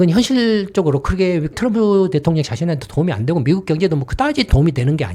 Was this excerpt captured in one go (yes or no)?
yes